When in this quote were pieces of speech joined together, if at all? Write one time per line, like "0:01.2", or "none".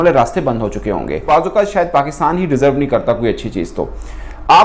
0:01.3